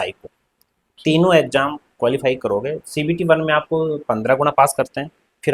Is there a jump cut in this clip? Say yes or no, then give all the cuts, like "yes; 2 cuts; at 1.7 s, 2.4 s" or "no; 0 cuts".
no; 0 cuts